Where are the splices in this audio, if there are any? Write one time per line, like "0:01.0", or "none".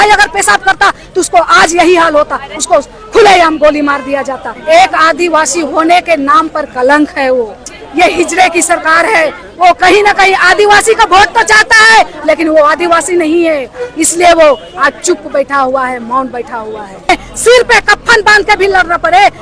0:04.5
0:07.8
0:17.1